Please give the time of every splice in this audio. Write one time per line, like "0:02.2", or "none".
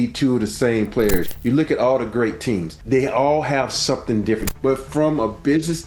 0:01.3
0:02.7
0:04.4